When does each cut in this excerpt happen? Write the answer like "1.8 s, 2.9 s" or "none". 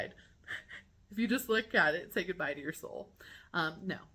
none